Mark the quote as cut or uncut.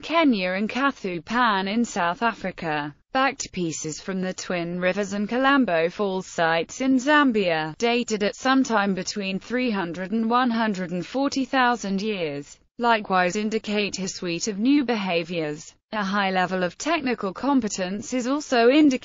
uncut